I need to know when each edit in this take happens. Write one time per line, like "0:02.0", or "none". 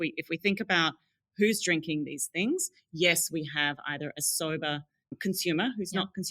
0:05.0